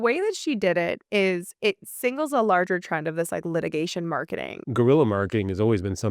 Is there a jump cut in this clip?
yes; 1 cut; at 4.6 s

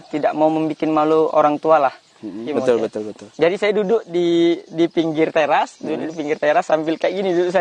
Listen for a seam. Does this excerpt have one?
yes; 1 cut; at 2.4 s

